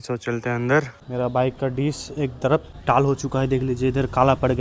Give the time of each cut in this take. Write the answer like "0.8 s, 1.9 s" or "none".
1.0 s, 2.7 s